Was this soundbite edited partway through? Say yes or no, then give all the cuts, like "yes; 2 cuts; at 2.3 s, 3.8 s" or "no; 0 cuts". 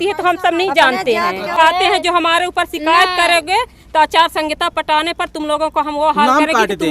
yes; 1 cut; at 1.6 s